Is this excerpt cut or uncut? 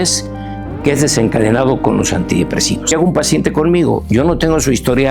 cut